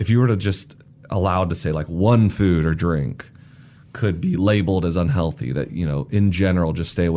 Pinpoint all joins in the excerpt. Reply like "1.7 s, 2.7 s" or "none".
none